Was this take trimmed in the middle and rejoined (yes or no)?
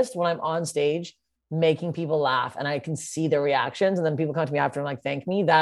no